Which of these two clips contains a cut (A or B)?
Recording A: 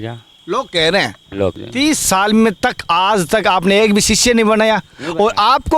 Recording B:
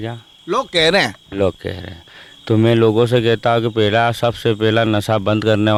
A